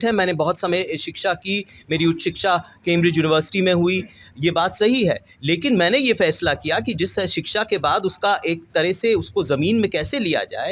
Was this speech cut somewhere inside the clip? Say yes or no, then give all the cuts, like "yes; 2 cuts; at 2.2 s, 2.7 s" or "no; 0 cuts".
no; 0 cuts